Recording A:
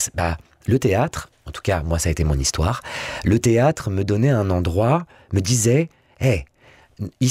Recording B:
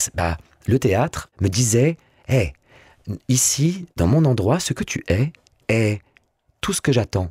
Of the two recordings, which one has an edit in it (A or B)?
B